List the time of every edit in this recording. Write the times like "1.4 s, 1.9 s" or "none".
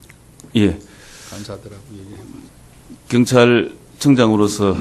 none